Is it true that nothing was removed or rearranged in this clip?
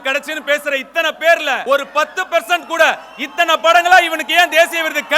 no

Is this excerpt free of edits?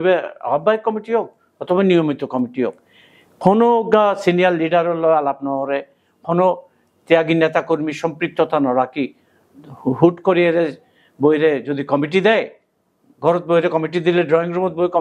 yes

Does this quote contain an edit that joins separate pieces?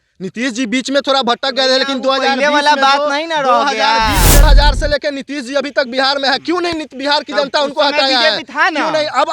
yes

